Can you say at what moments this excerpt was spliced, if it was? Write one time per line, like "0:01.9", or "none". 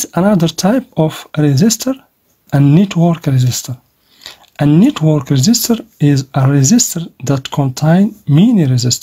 0:02.4

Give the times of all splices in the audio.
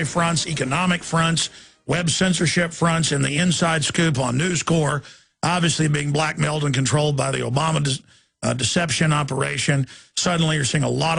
0:09.6

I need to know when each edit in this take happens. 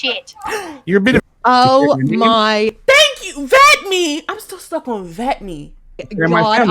0:01.2

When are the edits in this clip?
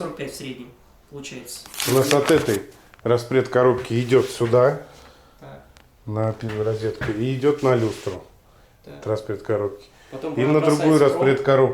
0:01.8

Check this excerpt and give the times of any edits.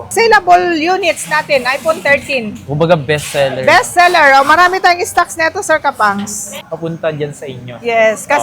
0:06.6

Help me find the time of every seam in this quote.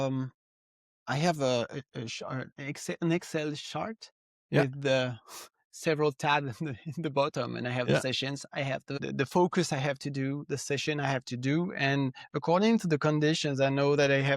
0:08.9

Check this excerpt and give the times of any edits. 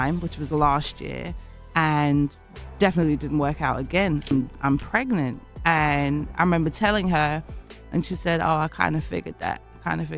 0:04.2

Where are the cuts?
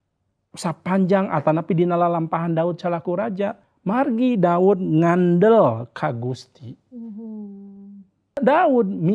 0:03.7
0:08.4

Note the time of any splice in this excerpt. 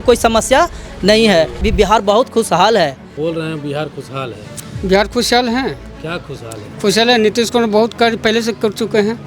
0:01.7
0:03.1

